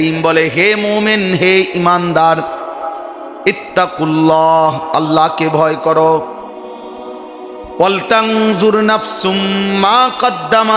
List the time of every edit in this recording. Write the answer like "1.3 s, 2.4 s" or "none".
none

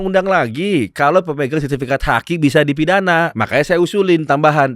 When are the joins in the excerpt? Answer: 3.3 s

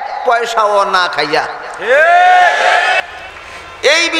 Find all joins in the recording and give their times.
3.0 s

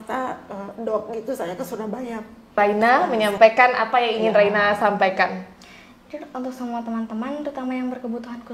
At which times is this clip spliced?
2.5 s

